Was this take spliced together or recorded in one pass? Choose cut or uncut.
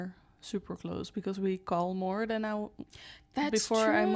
uncut